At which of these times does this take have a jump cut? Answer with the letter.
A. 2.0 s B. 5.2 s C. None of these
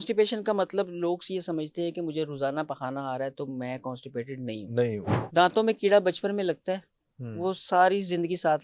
B